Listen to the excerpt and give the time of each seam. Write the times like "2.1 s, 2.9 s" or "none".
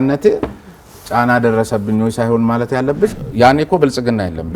3.1 s